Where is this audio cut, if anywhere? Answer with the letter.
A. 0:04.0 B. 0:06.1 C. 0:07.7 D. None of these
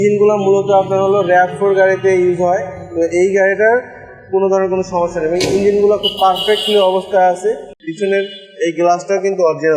C